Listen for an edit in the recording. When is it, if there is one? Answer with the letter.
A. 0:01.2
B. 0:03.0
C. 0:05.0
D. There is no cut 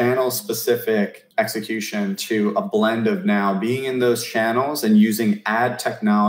A